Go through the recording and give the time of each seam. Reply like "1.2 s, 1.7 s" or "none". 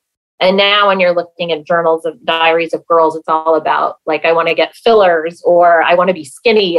none